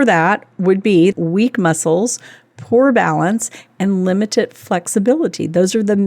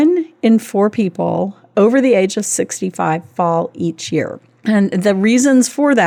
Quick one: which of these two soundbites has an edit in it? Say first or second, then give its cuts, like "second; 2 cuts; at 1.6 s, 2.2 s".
first; 1 cut; at 1.1 s